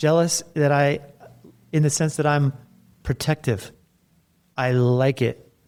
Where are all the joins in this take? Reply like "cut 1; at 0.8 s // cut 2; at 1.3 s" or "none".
none